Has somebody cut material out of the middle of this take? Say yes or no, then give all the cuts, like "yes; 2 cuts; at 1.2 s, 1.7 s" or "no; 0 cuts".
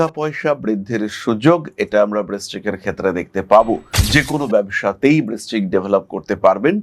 yes; 1 cut; at 3.9 s